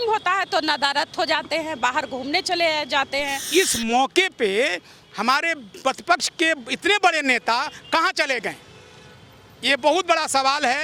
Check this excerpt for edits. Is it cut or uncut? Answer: cut